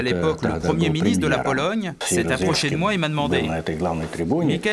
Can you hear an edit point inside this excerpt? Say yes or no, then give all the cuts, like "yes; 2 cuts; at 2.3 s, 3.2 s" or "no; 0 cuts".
yes; 1 cut; at 2.0 s